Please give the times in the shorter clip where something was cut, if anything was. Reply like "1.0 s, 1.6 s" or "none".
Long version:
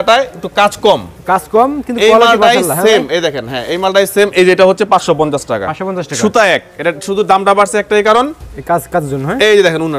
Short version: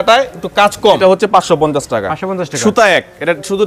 1.0 s